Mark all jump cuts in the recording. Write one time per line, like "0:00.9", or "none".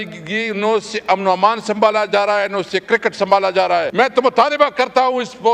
0:03.9